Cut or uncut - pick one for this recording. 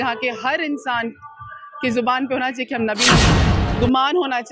cut